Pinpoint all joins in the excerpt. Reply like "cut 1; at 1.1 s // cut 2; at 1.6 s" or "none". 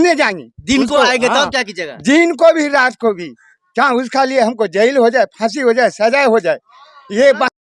none